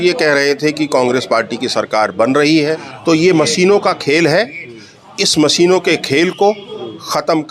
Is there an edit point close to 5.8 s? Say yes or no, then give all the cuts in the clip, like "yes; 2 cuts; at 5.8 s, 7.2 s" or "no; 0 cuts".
no; 1 cut; at 2.9 s